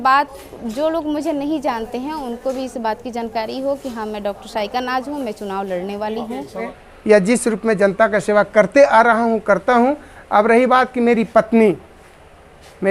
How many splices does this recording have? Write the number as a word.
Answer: one